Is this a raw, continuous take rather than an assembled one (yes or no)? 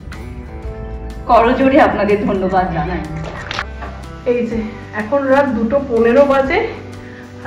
no